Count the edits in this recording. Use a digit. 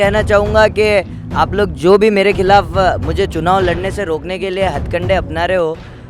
0